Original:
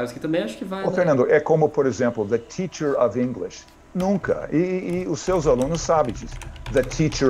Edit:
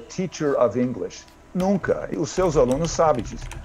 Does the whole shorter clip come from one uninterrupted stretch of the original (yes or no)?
no